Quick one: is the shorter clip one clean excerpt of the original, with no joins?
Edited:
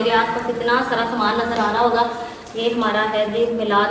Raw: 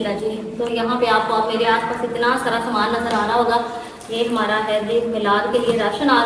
yes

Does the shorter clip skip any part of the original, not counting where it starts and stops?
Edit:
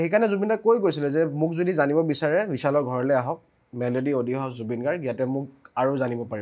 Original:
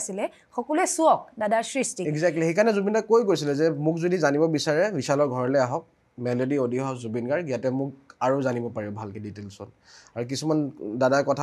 no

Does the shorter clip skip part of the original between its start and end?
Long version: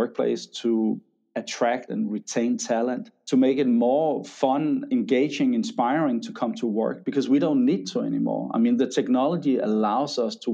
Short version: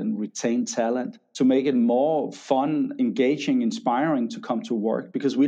no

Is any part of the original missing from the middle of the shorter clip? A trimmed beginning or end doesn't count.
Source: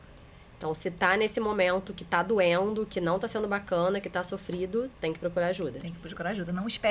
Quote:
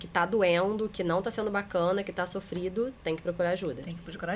no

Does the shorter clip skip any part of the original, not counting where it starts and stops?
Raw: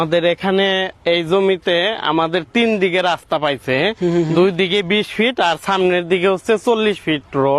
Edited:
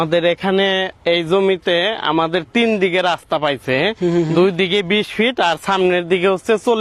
no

